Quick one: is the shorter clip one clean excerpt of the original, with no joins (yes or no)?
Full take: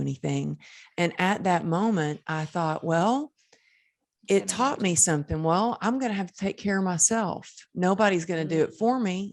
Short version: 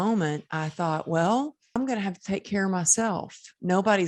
no